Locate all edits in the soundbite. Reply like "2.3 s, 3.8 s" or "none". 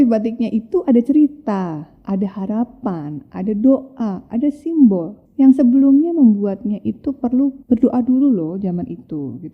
5.2 s, 7.6 s